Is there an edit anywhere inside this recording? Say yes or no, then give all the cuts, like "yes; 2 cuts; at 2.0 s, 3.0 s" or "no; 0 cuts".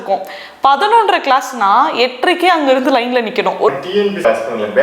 yes; 1 cut; at 3.8 s